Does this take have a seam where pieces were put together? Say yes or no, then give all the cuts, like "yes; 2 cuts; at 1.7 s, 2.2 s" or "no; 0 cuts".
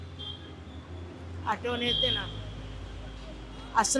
no; 0 cuts